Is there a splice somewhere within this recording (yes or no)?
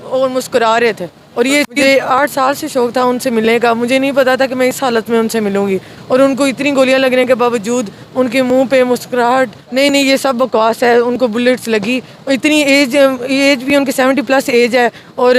yes